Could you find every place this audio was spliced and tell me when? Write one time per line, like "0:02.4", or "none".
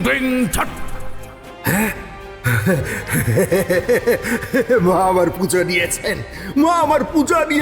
0:01.0